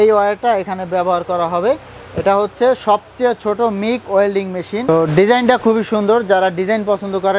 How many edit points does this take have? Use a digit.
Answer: 1